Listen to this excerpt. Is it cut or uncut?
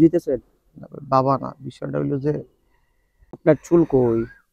cut